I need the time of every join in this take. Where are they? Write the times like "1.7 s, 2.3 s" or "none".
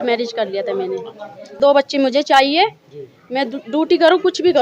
1.6 s